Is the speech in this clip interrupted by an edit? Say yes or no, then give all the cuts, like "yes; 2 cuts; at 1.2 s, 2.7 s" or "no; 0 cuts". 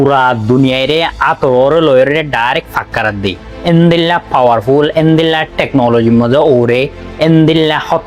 no; 0 cuts